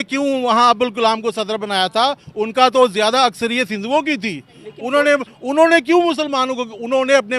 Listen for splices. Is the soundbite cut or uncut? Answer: uncut